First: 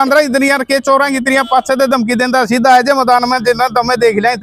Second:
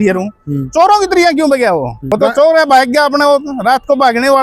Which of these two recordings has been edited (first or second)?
second